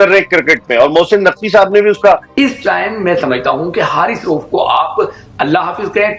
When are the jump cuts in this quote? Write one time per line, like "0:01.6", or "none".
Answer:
0:02.3